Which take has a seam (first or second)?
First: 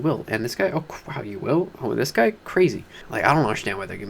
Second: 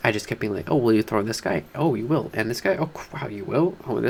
first